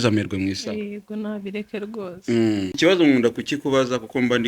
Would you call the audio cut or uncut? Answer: cut